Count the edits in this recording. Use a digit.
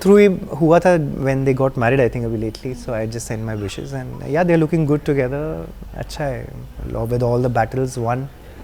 0